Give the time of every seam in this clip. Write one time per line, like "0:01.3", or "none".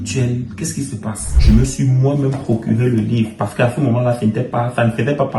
0:01.3